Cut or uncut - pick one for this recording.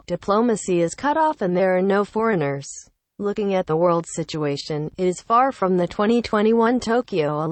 uncut